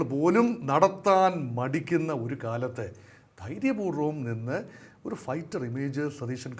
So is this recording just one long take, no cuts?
yes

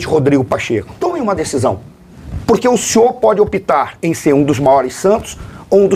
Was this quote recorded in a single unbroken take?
no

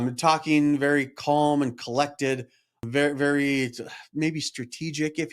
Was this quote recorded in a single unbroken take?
no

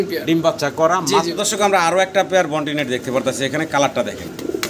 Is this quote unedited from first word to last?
no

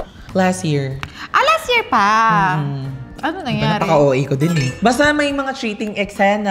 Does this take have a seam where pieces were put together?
no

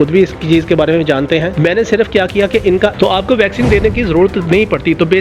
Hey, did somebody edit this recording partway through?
yes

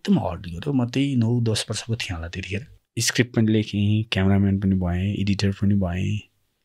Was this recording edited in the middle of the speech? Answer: yes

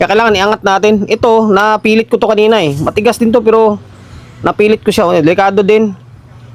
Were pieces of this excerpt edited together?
no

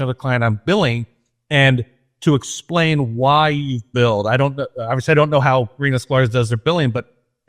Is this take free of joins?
yes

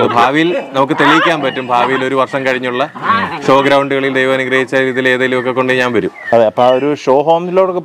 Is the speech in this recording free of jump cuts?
yes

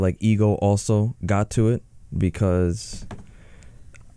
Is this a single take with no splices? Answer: yes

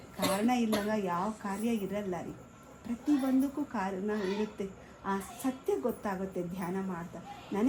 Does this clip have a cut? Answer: no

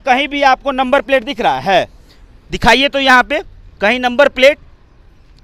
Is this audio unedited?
yes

